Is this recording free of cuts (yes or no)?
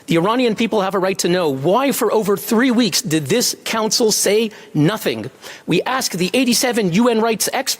no